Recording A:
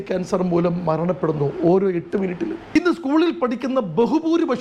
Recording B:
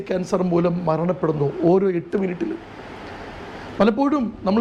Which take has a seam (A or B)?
A